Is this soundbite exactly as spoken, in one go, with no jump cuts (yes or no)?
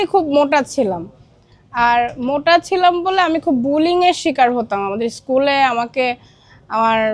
yes